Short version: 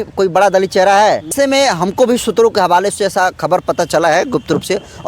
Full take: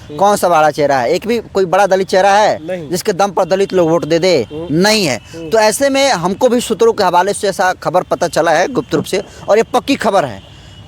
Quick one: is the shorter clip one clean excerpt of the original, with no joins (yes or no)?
no